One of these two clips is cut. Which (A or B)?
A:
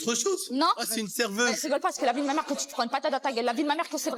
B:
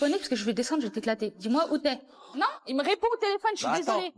B